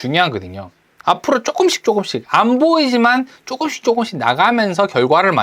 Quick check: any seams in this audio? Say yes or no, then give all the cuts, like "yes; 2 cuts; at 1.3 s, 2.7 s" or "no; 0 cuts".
yes; 1 cut; at 1.0 s